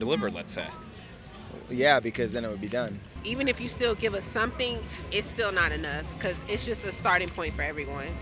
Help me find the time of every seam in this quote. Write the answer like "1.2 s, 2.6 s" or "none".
3.0 s